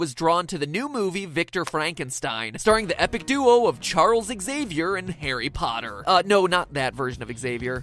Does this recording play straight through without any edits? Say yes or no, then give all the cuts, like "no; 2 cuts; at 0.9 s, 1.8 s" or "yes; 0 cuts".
yes; 0 cuts